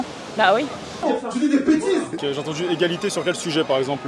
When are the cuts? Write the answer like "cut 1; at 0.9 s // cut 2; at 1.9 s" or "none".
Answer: cut 1; at 2.1 s